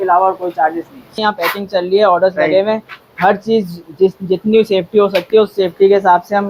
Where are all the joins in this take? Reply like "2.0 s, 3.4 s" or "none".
none